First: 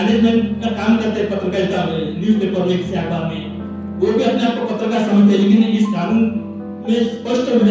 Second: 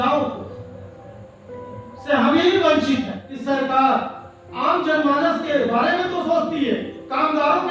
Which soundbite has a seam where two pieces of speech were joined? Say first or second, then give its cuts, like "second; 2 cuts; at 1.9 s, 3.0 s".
second; 1 cut; at 3.2 s